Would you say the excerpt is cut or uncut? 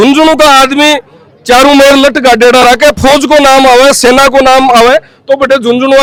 uncut